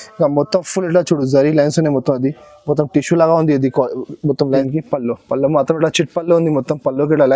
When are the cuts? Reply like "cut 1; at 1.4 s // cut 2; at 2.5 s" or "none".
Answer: cut 1; at 4.4 s